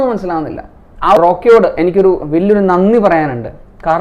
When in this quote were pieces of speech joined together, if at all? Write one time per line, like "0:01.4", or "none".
0:01.2